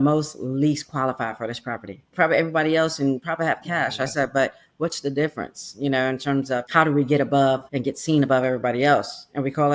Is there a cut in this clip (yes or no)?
yes